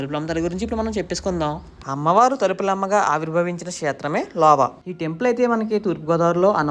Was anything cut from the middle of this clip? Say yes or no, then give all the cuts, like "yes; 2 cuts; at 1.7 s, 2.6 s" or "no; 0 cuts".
no; 0 cuts